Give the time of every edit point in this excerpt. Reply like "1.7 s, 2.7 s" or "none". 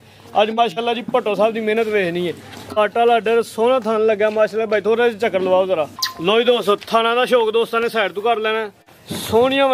6.0 s